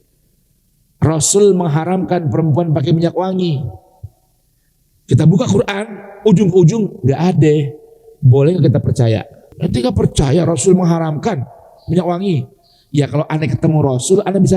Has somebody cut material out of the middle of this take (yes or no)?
yes